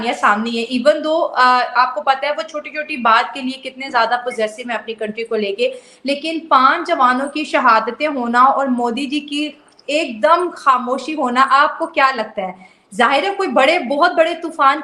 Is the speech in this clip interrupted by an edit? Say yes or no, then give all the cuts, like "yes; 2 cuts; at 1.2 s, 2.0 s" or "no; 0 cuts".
no; 0 cuts